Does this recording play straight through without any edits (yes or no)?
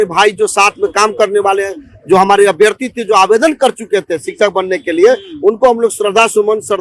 yes